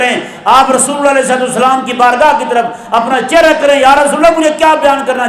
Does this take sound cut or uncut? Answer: uncut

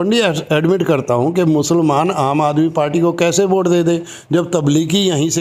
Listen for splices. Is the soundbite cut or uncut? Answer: uncut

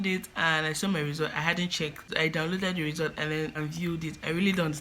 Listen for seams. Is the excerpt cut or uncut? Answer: cut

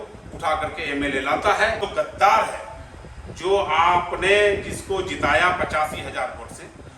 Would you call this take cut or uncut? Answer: cut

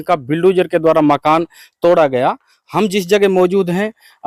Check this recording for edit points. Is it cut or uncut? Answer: uncut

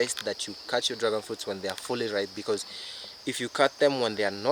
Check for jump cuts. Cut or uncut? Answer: uncut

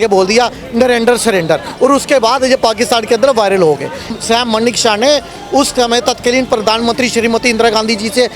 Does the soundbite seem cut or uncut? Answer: cut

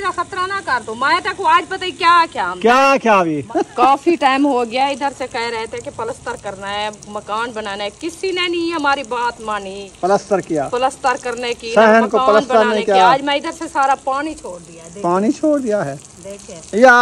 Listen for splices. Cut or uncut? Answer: cut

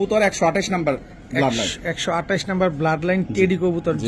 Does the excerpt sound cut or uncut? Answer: uncut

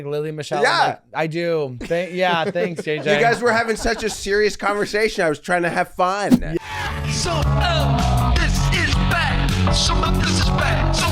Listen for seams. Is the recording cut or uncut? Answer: cut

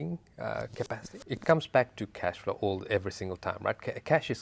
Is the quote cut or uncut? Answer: cut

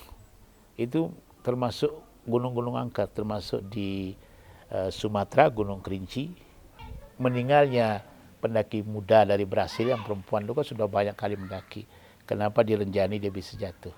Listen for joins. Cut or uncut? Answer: cut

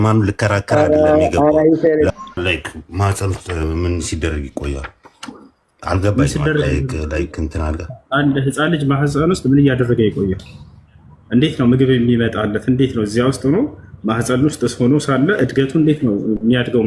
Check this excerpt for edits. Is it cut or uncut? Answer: cut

